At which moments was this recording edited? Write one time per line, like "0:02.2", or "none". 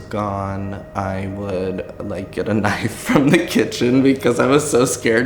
none